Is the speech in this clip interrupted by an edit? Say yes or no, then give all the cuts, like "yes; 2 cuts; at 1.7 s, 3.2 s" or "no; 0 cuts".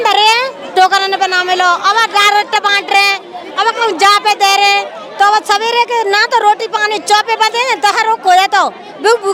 no; 0 cuts